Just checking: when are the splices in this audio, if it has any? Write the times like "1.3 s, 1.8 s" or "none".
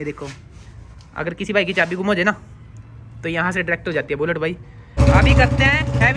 5.0 s